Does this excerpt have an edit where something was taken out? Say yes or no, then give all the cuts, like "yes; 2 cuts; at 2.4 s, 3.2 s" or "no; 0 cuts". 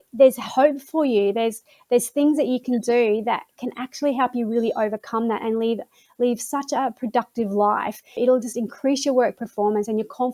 yes; 1 cut; at 8.2 s